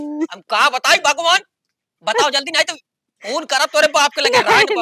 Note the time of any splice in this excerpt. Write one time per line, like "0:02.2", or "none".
none